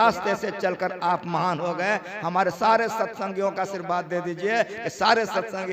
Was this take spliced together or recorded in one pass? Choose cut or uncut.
uncut